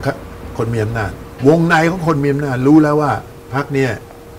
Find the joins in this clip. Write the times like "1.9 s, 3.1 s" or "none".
1.2 s, 3.4 s